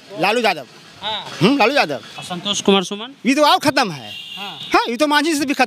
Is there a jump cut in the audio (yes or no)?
yes